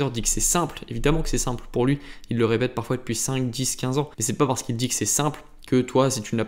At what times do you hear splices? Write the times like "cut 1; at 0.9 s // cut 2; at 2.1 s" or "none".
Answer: cut 1; at 4.2 s